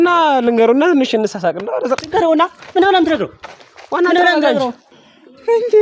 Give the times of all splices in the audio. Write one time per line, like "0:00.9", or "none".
0:04.8